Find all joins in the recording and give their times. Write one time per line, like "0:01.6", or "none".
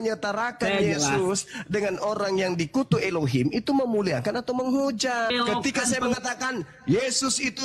0:05.3